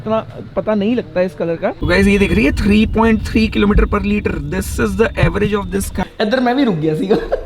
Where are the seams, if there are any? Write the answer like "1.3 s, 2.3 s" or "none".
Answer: 1.8 s, 6.0 s